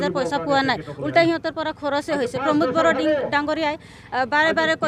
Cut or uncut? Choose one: uncut